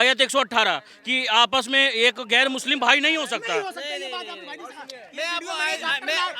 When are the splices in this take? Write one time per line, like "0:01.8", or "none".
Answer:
none